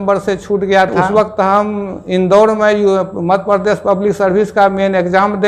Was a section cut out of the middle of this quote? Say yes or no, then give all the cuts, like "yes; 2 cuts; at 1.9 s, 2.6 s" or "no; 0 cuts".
yes; 1 cut; at 1.0 s